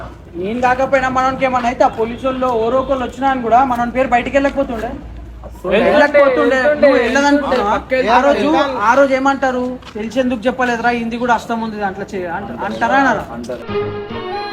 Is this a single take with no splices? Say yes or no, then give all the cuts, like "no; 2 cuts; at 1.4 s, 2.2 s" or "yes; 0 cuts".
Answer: yes; 0 cuts